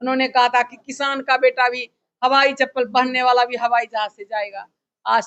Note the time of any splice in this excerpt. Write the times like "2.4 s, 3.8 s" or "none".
none